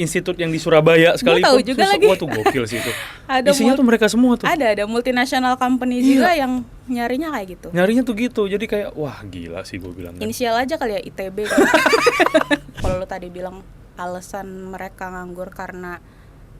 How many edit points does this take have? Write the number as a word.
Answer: one